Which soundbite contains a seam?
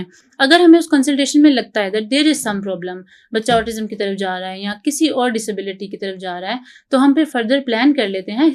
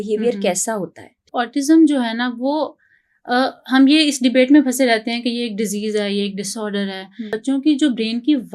second; 2 cuts; at 1.2 s, 7.4 s

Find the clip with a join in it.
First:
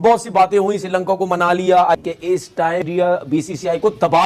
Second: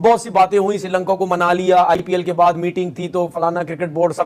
first; 1 cut; at 2.0 s

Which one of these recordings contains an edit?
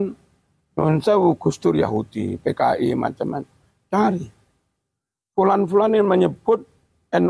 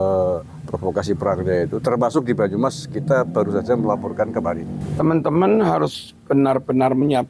second; 1 cut; at 4.8 s

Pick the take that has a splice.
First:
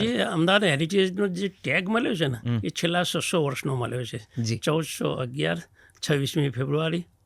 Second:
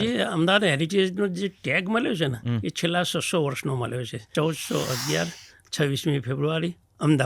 second; 1 cut; at 4.3 s

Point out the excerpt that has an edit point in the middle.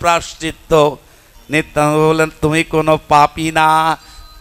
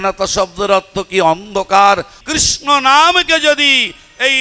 second; 1 cut; at 2.2 s

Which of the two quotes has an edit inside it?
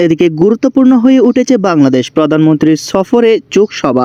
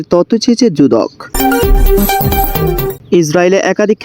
second; 2 cuts; at 1.2 s, 2.9 s

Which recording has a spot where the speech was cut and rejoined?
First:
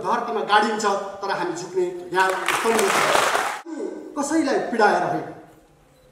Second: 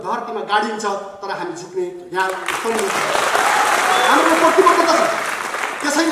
first; 1 cut; at 3.8 s

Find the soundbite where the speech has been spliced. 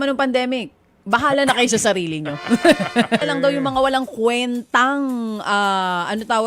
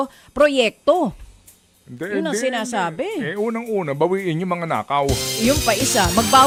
first; 1 cut; at 3.2 s

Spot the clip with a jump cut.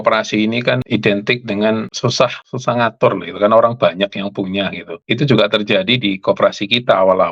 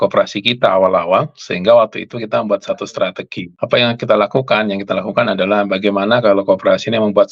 first; 3 cuts; at 0.8 s, 2.2 s, 4.9 s

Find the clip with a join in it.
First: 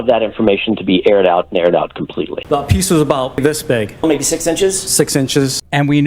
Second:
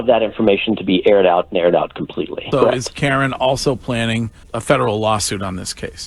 first; 2 cuts; at 2.4 s, 3.4 s

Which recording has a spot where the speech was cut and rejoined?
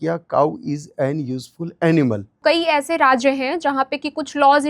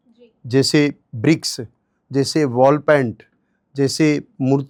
first; 1 cut; at 2.4 s

